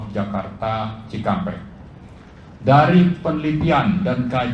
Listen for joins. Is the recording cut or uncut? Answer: uncut